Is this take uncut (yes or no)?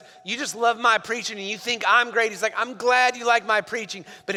yes